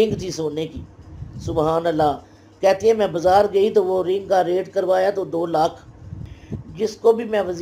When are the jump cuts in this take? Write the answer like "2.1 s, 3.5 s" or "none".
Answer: 6.3 s